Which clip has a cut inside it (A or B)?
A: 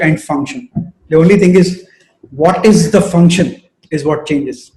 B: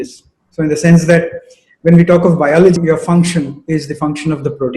B